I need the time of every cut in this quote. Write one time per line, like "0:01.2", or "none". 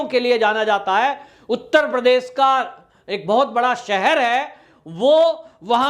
none